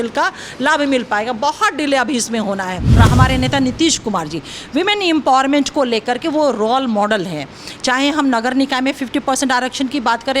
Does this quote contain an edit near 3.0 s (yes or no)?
yes